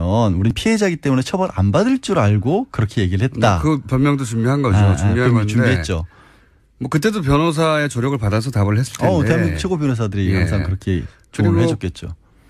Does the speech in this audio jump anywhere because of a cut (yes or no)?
yes